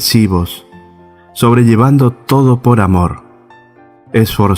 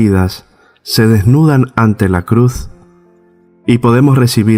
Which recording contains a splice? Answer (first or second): first